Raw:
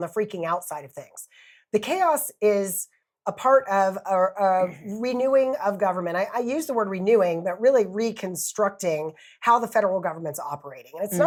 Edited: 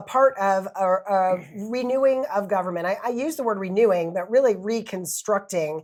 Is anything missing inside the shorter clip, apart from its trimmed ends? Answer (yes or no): no